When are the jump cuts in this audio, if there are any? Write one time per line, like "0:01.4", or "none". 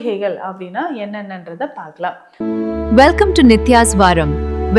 0:02.2